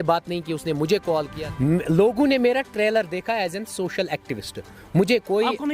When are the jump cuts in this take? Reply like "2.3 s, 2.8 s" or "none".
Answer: 1.4 s